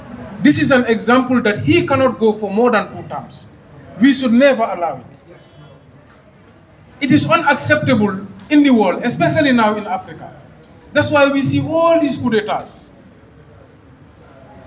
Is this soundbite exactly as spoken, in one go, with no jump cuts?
yes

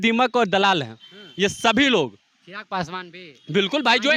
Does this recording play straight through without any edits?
yes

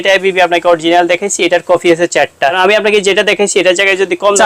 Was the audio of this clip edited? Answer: yes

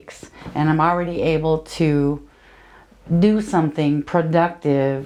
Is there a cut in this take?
no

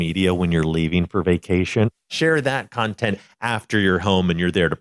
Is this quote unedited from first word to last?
no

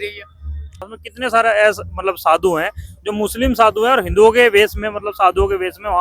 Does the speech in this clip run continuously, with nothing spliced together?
no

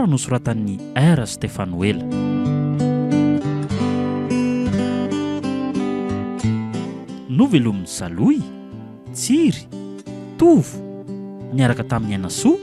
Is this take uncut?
no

